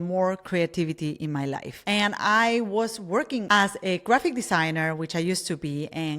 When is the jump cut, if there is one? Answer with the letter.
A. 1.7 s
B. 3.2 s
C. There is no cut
A